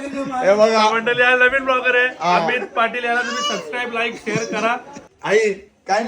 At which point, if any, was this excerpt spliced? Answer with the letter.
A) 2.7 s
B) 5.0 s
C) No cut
B